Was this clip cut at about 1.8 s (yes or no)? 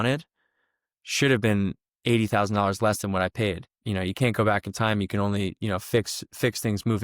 no